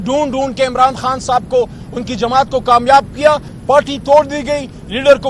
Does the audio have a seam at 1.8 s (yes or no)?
no